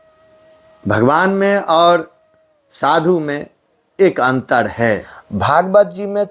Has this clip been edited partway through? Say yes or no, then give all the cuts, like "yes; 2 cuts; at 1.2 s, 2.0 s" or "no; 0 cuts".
yes; 1 cut; at 5.2 s